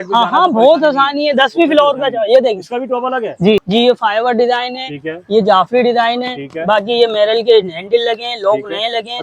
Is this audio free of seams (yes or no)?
no